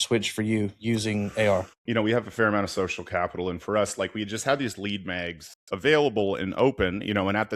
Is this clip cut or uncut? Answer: cut